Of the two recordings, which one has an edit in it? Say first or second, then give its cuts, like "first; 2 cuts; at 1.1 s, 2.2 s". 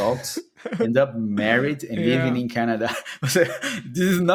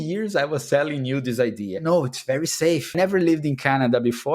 second; 2 cuts; at 1.8 s, 2.9 s